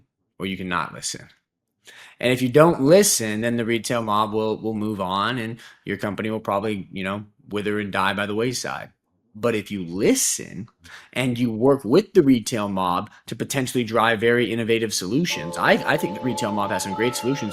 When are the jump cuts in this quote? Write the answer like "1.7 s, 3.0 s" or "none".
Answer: none